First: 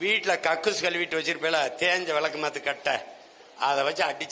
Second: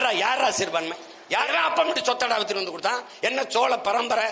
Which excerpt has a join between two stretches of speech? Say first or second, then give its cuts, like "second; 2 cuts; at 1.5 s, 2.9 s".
second; 1 cut; at 1.5 s